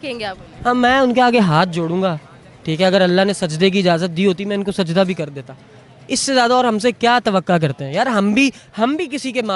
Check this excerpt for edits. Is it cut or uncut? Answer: uncut